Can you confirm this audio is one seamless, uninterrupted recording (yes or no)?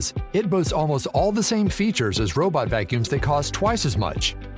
yes